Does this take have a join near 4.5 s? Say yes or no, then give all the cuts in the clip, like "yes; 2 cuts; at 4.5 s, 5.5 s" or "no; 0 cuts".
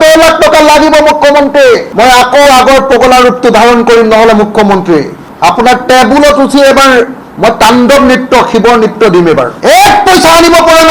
no; 2 cuts; at 1.9 s, 9.5 s